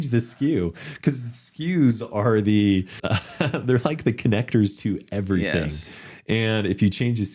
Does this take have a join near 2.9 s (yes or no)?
yes